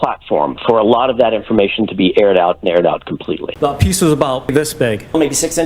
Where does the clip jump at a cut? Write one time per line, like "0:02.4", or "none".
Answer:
0:03.5
0:04.5